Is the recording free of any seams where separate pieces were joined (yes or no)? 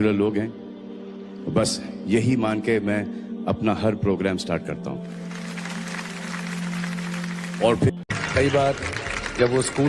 no